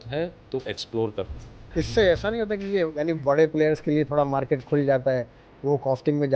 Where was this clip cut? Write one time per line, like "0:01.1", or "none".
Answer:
0:01.6